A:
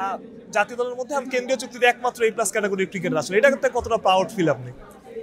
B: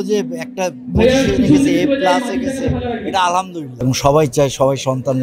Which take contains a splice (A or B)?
B